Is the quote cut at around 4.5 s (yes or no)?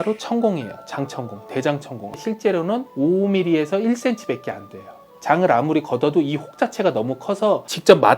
no